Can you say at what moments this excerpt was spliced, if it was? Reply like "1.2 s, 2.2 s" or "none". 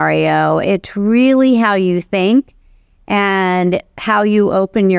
none